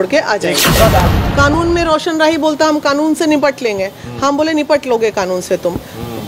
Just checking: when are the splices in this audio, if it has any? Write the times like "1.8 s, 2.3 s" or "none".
1.1 s